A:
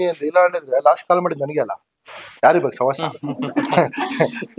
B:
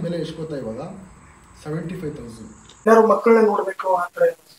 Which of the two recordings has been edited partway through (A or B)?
B